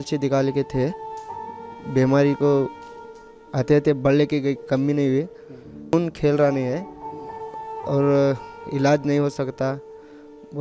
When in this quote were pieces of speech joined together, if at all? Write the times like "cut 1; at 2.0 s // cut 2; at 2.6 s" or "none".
cut 1; at 5.9 s